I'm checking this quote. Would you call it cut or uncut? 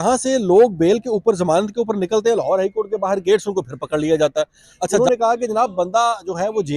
cut